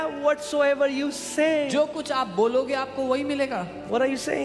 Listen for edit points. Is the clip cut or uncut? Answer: uncut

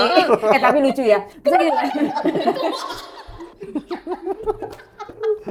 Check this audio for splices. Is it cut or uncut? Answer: uncut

